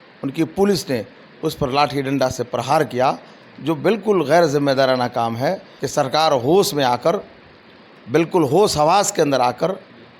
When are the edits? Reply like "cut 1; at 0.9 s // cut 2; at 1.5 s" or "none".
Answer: cut 1; at 5.7 s